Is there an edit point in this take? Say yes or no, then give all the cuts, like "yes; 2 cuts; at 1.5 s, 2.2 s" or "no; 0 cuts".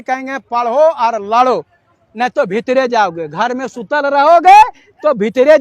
no; 0 cuts